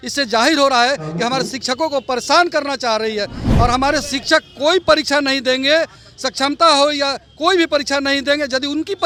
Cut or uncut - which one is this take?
uncut